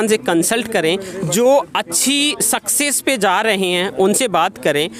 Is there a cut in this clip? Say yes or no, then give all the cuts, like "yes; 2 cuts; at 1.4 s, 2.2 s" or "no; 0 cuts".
no; 0 cuts